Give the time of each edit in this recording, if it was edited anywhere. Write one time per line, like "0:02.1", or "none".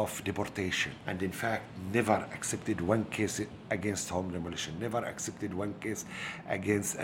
0:00.9